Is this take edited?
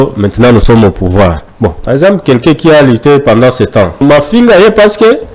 yes; 2 cuts; at 1.5 s, 4.0 s

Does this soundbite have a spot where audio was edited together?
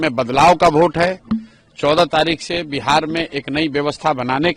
no; 0 cuts

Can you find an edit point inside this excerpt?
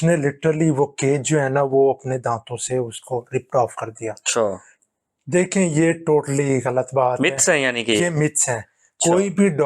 yes; 1 cut; at 4.8 s

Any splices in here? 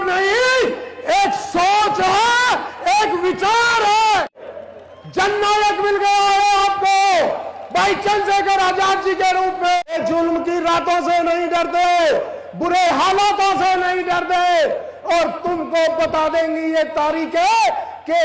yes; 2 cuts; at 4.5 s, 9.8 s

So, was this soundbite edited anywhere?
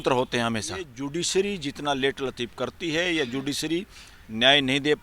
yes; 1 cut; at 1.0 s

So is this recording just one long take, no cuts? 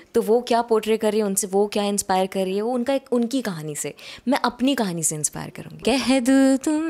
no; 1 cut; at 5.7 s

